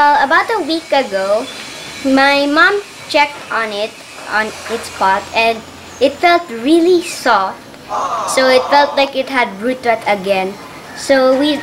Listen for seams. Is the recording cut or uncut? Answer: uncut